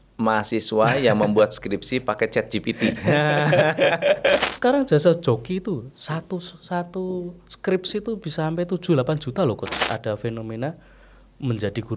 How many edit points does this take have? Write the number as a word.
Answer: two